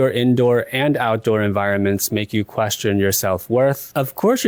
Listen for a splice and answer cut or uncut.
uncut